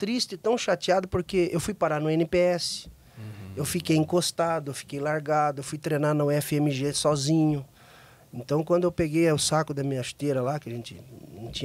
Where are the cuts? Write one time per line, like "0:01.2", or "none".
none